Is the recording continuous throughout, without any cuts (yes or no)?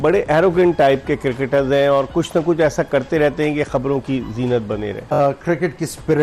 no